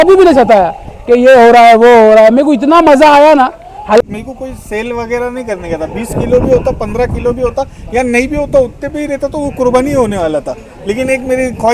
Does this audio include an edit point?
yes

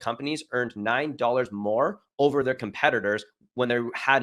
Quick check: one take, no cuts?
yes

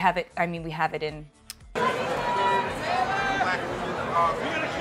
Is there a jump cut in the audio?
no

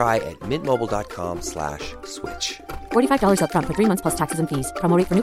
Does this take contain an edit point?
no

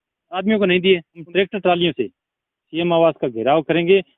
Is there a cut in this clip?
yes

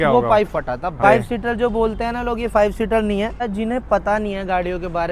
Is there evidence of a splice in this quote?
yes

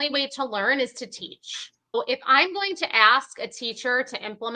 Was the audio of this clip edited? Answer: yes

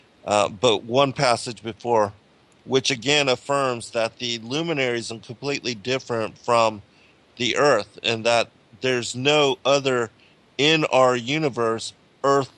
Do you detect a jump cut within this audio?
yes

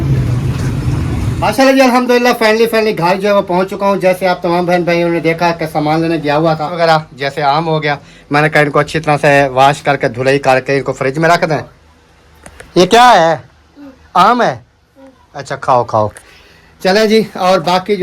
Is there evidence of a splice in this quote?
yes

